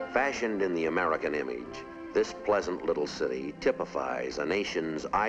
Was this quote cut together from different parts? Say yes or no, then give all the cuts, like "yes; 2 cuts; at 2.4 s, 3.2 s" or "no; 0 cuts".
no; 0 cuts